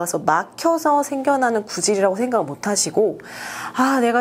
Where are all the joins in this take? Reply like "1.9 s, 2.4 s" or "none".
none